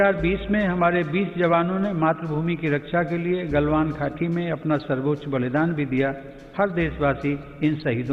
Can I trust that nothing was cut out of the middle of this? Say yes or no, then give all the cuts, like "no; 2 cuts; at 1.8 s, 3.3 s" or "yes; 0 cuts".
yes; 0 cuts